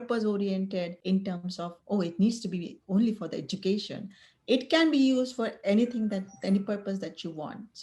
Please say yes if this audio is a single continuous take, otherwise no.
no